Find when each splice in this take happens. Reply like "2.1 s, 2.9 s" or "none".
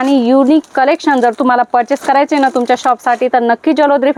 none